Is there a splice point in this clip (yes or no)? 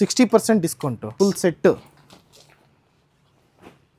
yes